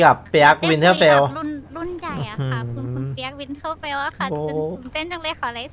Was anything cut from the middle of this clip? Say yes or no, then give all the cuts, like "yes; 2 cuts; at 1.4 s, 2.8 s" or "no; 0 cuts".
no; 0 cuts